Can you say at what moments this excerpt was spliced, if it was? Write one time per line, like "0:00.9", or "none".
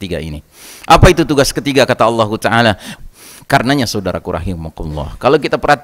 0:02.9